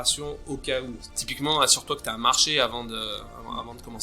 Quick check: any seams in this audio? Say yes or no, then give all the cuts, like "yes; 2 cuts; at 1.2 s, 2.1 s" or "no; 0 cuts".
yes; 1 cut; at 1.1 s